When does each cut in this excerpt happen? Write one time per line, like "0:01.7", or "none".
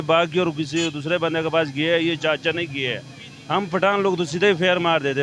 none